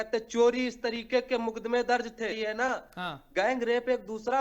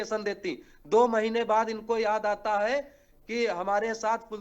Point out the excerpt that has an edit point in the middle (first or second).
first